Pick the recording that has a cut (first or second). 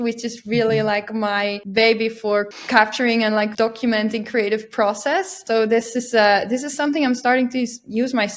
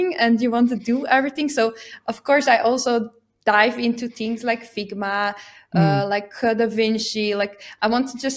first